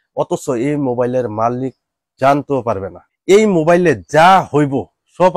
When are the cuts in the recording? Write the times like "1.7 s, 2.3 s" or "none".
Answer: 3.0 s

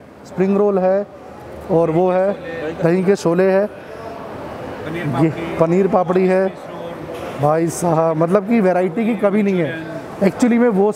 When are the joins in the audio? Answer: none

